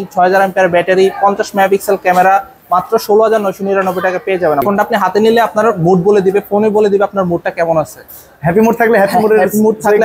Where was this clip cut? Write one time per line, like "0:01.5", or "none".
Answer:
0:04.7